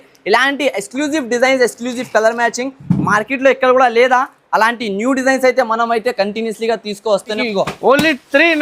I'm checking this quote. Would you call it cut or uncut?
cut